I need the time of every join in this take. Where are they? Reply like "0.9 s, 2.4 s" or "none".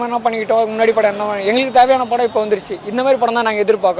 none